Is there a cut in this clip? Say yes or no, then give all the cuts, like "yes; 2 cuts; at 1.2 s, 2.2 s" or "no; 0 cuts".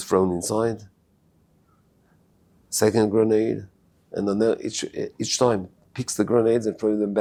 no; 0 cuts